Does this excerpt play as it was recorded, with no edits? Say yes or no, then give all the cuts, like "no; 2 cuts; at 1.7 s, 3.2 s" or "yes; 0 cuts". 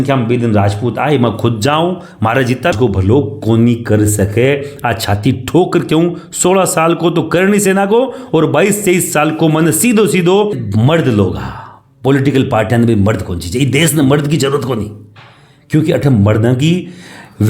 no; 2 cuts; at 2.7 s, 10.6 s